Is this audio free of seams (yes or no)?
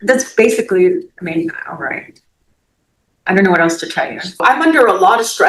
no